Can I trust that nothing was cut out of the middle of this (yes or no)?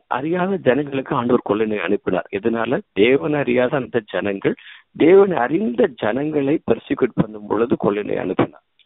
yes